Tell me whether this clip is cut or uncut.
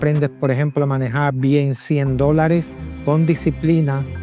uncut